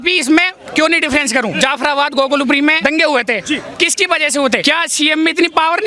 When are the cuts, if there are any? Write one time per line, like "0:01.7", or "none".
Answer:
0:01.5
0:02.8
0:04.6